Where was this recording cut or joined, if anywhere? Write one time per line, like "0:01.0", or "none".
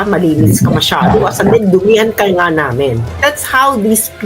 0:03.1